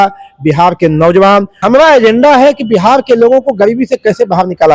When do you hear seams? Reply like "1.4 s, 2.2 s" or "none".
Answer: 1.5 s

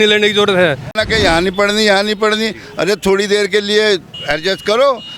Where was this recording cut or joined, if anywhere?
1.0 s

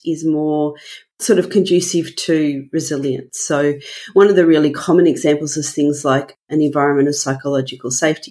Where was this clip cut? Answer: 3.3 s

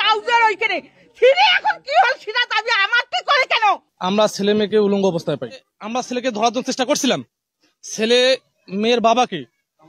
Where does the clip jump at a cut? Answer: 3.9 s

